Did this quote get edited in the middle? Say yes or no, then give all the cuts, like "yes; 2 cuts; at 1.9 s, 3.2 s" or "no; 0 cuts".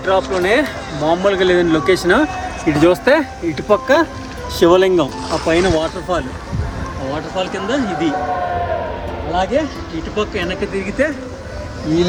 no; 0 cuts